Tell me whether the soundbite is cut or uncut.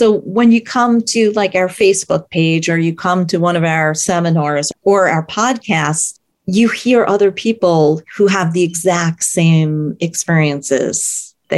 uncut